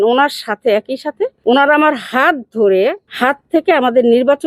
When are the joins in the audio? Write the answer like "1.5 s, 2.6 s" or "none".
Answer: 1.4 s, 3.1 s